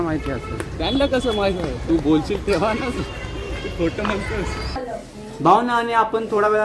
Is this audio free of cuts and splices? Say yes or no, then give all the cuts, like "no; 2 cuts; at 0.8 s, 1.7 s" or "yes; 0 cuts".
no; 1 cut; at 4.8 s